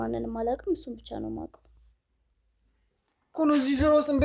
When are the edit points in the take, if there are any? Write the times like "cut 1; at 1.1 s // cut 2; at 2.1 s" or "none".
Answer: cut 1; at 3.3 s